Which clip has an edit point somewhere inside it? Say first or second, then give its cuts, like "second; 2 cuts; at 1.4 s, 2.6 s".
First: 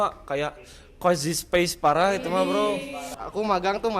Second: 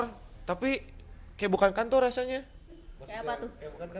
first; 1 cut; at 3.1 s